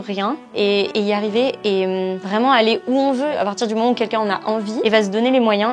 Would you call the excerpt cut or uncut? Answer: cut